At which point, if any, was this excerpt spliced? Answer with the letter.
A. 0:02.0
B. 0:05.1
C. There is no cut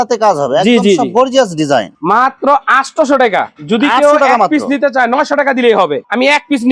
C